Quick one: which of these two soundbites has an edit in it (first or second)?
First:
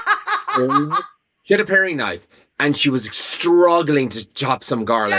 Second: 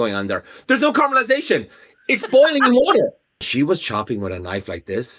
second